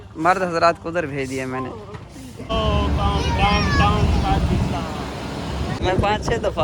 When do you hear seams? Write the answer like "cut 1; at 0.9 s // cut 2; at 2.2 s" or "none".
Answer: cut 1; at 2.3 s // cut 2; at 5.8 s